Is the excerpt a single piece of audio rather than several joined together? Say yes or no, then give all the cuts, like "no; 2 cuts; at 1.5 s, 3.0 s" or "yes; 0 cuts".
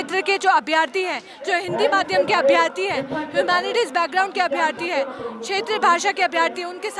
yes; 0 cuts